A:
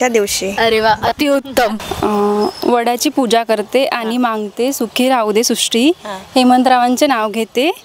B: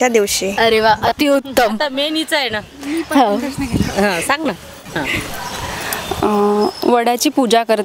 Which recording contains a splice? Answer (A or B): A